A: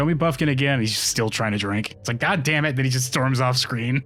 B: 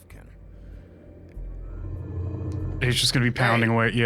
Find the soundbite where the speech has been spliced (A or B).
B